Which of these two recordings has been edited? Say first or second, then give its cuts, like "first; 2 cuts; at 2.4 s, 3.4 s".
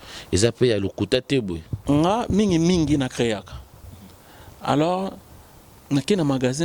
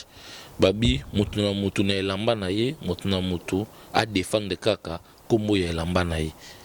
first; 1 cut; at 1.7 s